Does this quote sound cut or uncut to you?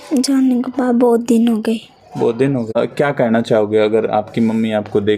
cut